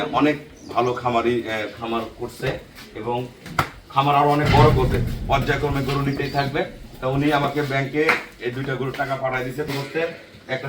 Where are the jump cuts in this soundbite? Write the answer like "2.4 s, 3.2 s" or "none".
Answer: 9.7 s